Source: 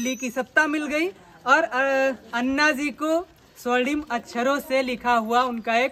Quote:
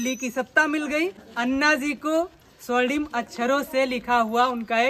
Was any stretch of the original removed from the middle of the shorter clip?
yes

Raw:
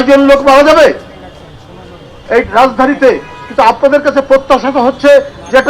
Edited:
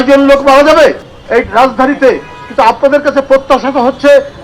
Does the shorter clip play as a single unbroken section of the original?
no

